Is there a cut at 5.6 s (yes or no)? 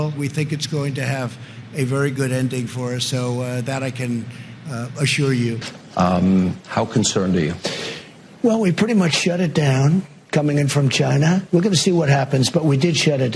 yes